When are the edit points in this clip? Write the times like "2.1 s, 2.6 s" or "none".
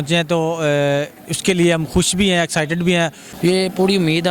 3.0 s